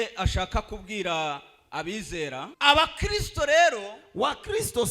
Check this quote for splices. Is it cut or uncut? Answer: cut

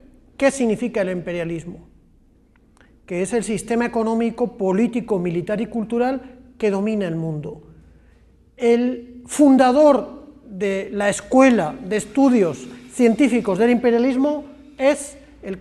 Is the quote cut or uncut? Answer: uncut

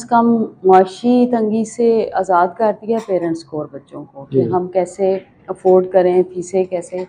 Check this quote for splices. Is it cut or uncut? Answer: uncut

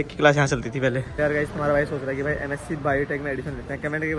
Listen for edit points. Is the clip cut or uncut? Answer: cut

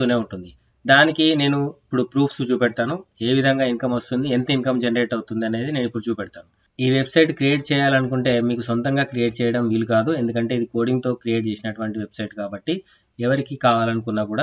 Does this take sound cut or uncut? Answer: cut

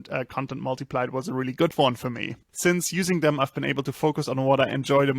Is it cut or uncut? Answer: cut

